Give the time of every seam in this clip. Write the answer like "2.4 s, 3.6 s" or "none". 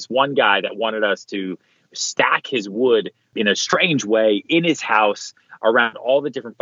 3.3 s